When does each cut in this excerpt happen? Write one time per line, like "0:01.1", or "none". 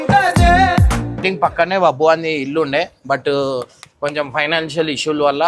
0:01.1